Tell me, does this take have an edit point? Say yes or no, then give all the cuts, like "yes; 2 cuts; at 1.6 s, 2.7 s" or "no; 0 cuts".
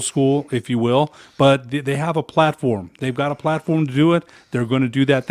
no; 0 cuts